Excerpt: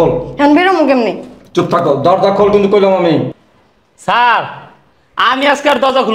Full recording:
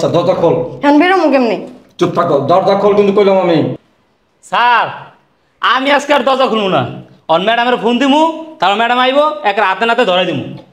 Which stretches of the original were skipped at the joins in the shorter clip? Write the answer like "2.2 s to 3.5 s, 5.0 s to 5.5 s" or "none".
none